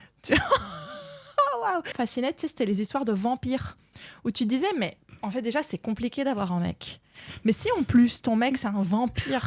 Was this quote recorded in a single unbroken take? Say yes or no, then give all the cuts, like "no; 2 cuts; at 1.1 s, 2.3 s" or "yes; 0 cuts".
no; 1 cut; at 1.9 s